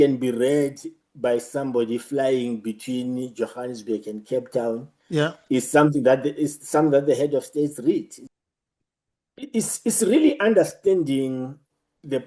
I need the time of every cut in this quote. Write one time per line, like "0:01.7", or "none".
0:08.2